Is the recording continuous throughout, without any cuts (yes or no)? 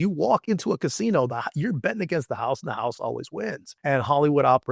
no